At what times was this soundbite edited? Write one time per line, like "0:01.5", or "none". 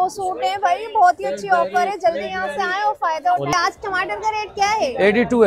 0:03.5